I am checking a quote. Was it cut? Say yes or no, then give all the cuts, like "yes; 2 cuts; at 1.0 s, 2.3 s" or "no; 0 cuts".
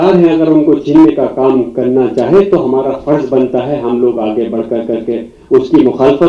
no; 0 cuts